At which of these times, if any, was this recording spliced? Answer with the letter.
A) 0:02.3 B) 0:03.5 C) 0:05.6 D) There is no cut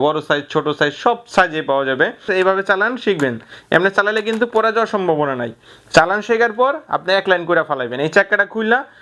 A